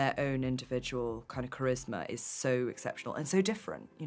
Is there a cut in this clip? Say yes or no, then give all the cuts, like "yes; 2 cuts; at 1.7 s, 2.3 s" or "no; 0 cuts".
no; 0 cuts